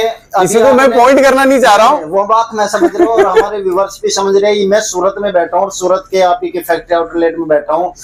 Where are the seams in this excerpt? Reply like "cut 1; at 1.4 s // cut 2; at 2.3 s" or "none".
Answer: none